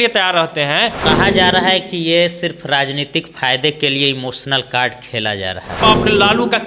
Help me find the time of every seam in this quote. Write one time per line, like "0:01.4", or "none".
0:01.0
0:05.8

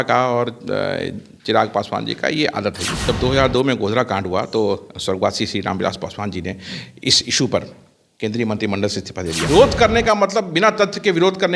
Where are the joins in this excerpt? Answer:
0:02.9
0:09.4

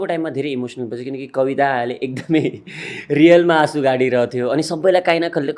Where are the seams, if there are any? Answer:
none

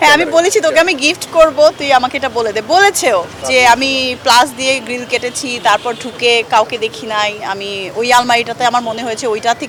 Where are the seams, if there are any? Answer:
none

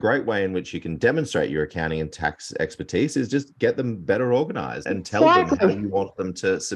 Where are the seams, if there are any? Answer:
0:04.8

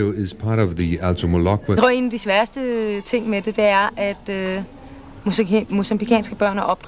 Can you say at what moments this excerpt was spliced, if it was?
none

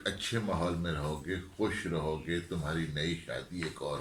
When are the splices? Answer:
none

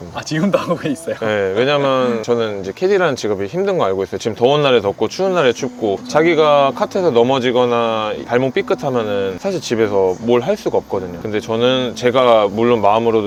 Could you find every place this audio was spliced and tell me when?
none

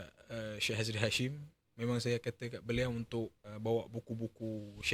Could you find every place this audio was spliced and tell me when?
0:03.4

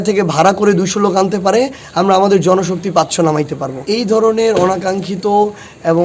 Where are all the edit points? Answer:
0:03.8

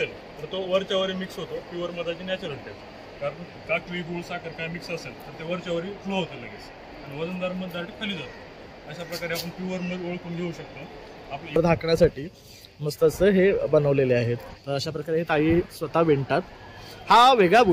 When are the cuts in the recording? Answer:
0:11.6

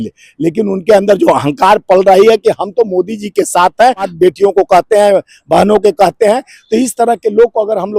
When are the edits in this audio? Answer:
0:04.1

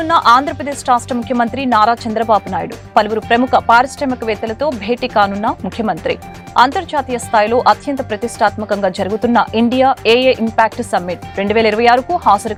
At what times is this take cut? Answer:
none

